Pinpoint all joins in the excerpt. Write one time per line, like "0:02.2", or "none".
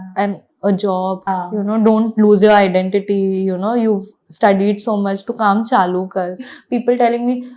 0:01.3
0:06.5